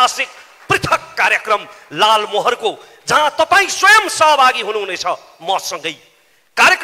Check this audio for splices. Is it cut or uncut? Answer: uncut